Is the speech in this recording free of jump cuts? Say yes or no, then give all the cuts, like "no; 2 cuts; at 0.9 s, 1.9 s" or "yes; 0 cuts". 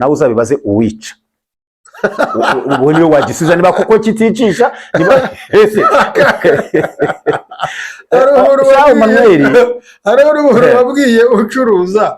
yes; 0 cuts